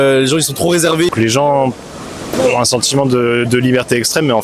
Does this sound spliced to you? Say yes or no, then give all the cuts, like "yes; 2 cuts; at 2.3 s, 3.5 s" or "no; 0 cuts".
yes; 1 cut; at 1.1 s